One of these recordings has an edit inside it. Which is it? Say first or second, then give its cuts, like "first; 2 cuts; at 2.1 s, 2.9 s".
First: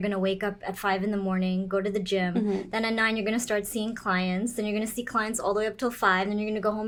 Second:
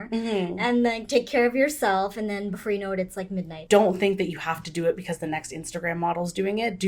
second; 1 cut; at 3.6 s